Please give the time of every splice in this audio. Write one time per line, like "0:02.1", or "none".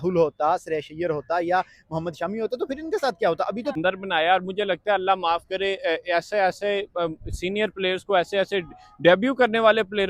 0:03.8